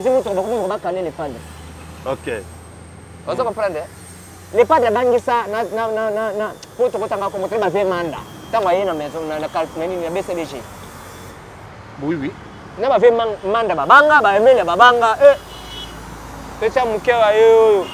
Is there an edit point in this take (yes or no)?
no